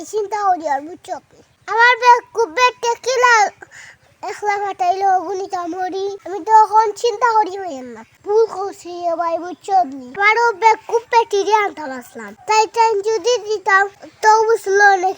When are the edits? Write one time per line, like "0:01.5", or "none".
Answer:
0:08.0